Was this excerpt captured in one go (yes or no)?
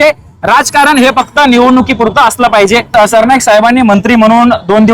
no